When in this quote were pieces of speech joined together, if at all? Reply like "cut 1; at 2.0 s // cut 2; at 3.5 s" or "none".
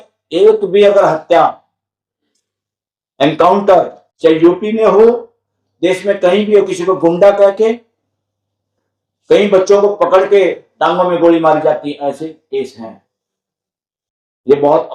none